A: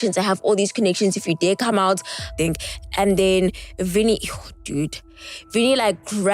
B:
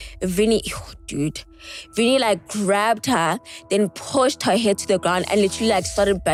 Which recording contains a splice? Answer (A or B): A